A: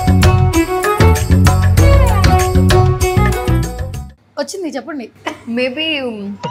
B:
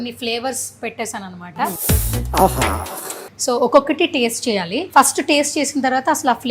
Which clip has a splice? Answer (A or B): B